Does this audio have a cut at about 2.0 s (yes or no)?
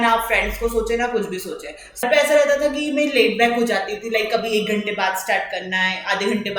yes